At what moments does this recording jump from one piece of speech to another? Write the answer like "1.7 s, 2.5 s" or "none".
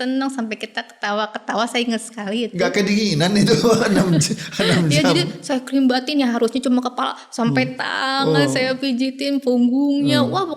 none

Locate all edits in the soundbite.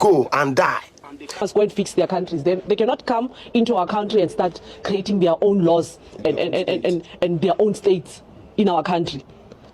1.5 s

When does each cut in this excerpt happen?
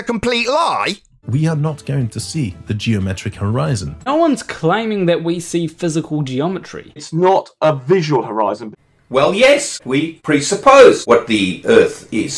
1.3 s, 4.1 s, 7.0 s, 8.7 s, 10.0 s, 11.0 s

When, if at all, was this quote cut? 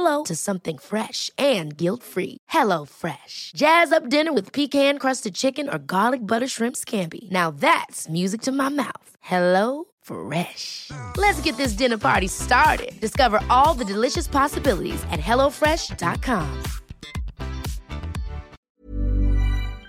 18.5 s

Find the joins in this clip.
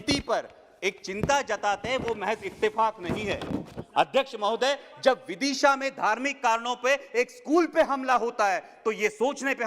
none

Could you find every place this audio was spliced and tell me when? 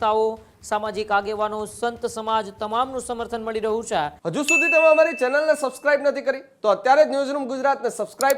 4.2 s

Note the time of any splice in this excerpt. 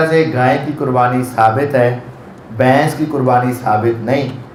none

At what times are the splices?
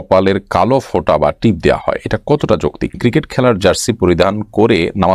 3.0 s

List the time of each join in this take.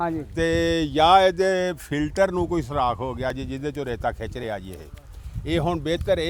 none

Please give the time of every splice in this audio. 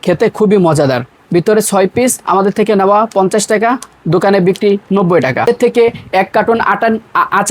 1.2 s, 5.4 s

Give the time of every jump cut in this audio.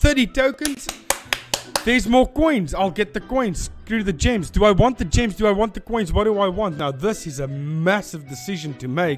none

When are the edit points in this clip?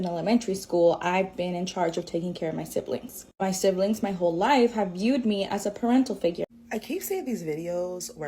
6.5 s

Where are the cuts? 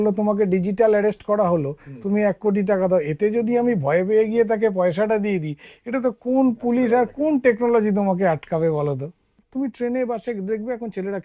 9.4 s

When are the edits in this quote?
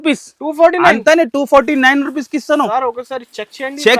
none

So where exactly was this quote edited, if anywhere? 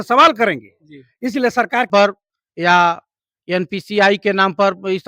1.9 s

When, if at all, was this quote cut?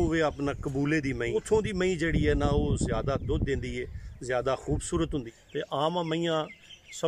1.3 s, 5.3 s

